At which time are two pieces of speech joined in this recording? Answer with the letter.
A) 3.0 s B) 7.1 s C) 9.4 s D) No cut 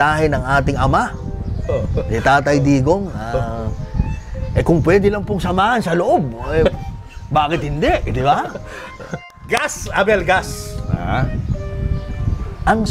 C